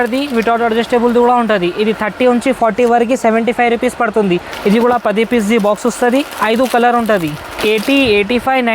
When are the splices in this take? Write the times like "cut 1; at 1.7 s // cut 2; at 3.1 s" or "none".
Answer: cut 1; at 4.5 s // cut 2; at 7.5 s

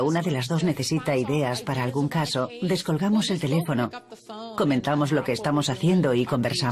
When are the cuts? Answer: none

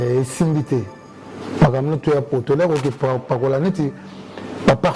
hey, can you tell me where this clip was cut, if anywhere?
none

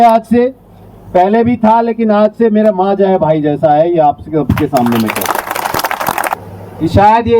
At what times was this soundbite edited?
cut 1; at 6.3 s

